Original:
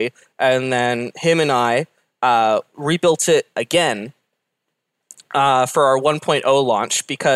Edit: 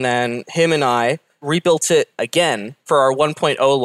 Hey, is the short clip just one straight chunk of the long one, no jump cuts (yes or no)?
no